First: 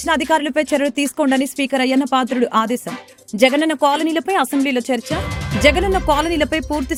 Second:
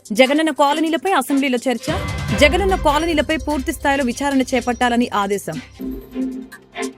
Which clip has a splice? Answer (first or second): second